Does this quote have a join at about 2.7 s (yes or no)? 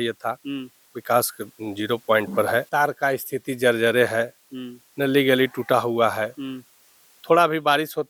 no